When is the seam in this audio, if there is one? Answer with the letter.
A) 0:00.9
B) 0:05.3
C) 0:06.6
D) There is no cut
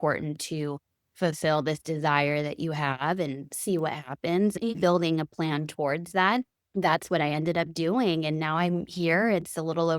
C